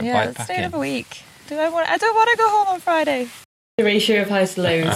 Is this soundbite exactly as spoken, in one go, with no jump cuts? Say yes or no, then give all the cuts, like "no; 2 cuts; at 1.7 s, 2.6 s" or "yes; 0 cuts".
no; 1 cut; at 3.7 s